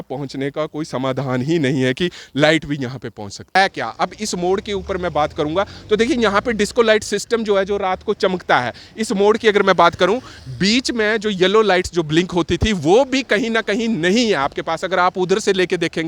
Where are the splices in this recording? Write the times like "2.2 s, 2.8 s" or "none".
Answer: 3.6 s